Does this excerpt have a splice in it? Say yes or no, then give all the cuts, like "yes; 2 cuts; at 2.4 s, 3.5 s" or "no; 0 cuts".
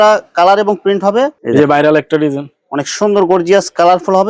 yes; 1 cut; at 1.4 s